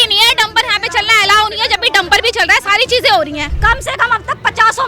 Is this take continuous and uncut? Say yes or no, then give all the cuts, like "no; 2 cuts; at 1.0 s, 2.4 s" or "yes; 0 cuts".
no; 1 cut; at 3.5 s